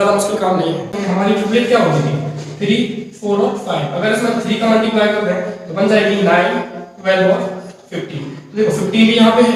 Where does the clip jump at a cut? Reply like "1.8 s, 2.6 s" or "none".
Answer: 0.9 s